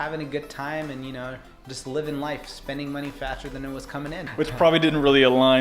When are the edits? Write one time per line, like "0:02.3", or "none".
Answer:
0:04.2